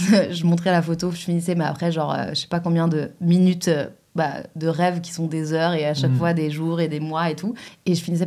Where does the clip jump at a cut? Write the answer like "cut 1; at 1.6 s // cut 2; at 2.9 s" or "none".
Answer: none